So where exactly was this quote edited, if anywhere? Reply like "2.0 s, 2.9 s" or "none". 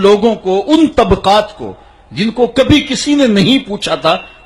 none